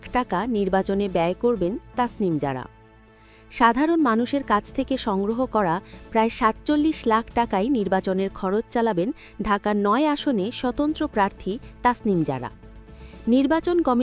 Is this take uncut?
yes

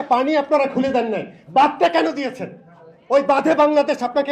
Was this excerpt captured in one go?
yes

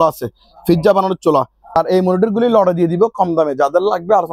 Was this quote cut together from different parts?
yes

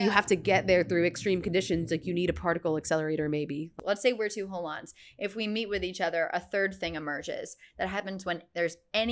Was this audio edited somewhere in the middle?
yes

